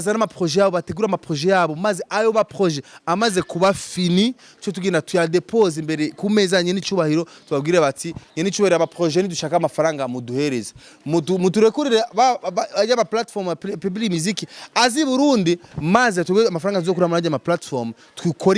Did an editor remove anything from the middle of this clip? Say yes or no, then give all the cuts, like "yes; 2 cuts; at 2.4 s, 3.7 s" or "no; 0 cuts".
no; 0 cuts